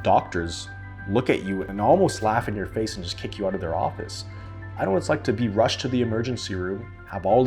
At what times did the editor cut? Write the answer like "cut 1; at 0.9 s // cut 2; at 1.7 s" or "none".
cut 1; at 1.7 s